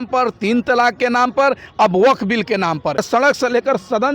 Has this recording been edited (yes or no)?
yes